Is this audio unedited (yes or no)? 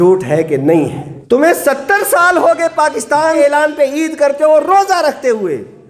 no